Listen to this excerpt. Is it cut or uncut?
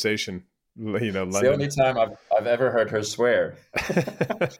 cut